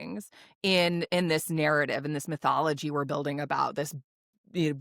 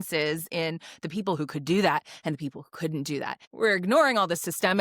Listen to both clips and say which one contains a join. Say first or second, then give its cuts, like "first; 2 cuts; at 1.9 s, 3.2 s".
second; 1 cut; at 3.4 s